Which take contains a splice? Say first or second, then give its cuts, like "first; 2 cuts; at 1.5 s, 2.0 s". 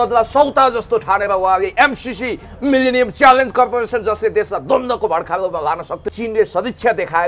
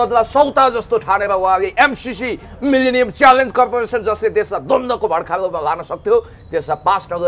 first; 1 cut; at 6.0 s